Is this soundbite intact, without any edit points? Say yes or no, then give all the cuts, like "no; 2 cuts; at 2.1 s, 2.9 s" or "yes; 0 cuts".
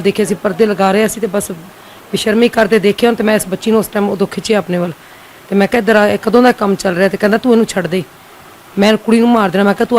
yes; 0 cuts